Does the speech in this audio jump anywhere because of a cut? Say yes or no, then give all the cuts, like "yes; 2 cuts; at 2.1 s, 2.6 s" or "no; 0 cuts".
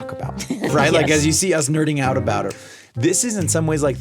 yes; 1 cut; at 2.8 s